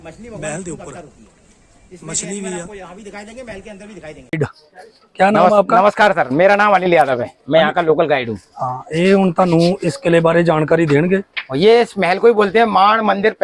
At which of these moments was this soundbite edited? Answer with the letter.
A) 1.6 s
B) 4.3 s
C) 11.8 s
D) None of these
B